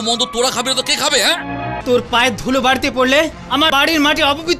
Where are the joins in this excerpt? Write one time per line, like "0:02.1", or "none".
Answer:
0:01.8